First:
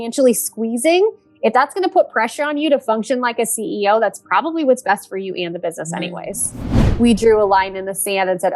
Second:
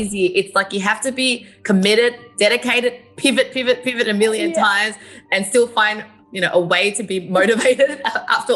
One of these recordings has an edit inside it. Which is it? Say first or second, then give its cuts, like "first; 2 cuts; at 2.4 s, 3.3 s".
first; 1 cut; at 6.8 s